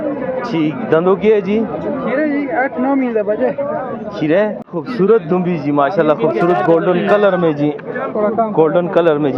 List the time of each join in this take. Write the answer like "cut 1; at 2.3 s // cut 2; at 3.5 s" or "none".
cut 1; at 4.6 s